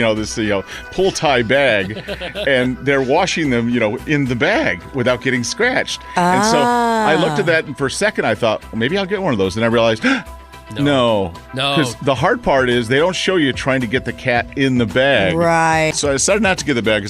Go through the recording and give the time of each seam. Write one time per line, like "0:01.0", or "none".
0:15.9